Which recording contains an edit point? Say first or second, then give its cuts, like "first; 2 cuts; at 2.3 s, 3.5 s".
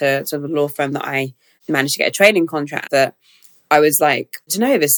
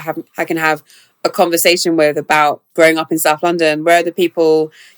second; 1 cut; at 2.6 s